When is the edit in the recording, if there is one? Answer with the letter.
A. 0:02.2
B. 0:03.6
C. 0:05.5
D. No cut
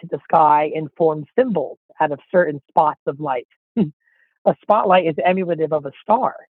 D